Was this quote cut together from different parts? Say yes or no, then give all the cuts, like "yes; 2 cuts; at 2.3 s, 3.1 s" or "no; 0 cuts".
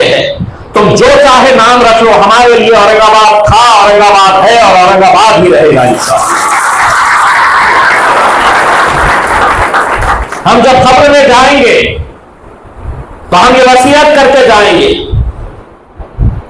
no; 0 cuts